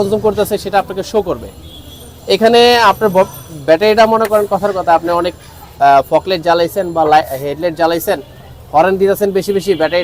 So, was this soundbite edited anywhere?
no; 0 cuts

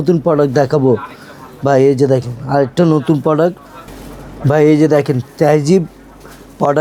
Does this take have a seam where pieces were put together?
no; 0 cuts

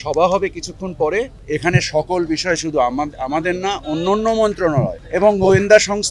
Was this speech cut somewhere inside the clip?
yes; 2 cuts; at 1.4 s, 5.0 s

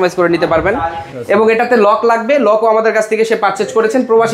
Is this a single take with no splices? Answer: no; 1 cut; at 1.1 s

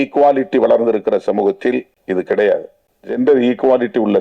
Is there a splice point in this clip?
yes; 2 cuts; at 1.9 s, 3.2 s

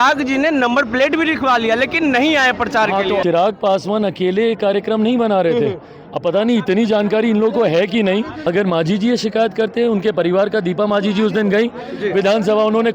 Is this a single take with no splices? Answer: no; 2 cuts; at 3.2 s, 8.5 s

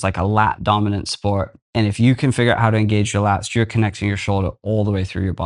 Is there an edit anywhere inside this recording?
yes; 1 cut; at 1.6 s

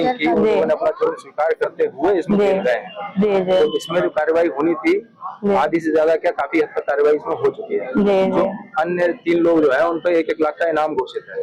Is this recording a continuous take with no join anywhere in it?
yes; 0 cuts

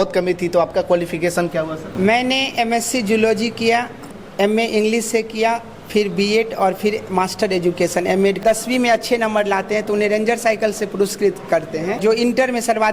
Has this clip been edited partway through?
yes; 4 cuts; at 1.8 s, 4.2 s, 8.4 s, 12.0 s

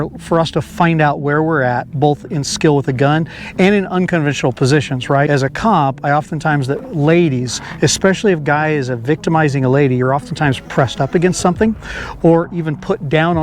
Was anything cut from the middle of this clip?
yes; 1 cut; at 5.3 s

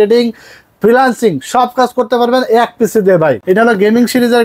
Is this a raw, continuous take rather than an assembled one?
no; 1 cut; at 3.4 s

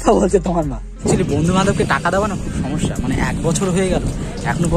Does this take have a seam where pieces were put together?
yes; 1 cut; at 1.0 s

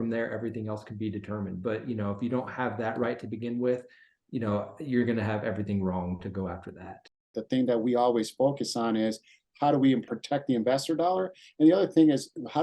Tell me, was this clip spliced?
yes; 2 cuts; at 7.4 s, 10.1 s

